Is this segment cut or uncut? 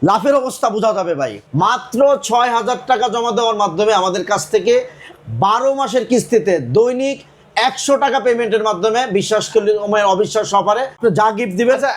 cut